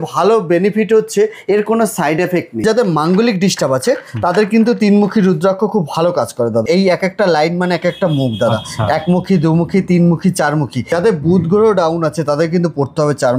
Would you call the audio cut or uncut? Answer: cut